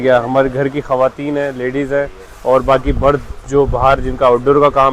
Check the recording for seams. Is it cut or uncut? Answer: uncut